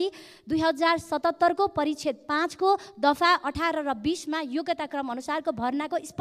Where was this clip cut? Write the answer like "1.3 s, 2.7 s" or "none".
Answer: none